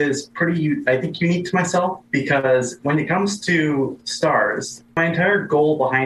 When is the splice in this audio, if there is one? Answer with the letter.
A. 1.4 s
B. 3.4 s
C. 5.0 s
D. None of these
C